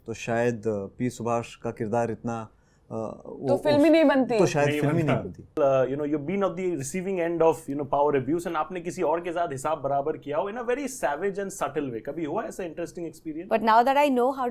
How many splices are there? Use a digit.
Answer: 2